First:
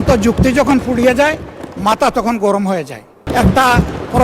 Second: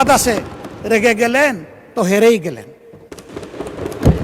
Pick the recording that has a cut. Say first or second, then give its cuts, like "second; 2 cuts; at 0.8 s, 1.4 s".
first; 1 cut; at 3.3 s